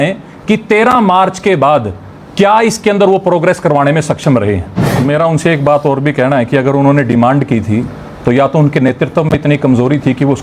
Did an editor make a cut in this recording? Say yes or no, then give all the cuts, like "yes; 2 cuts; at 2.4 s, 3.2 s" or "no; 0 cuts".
yes; 1 cut; at 4.9 s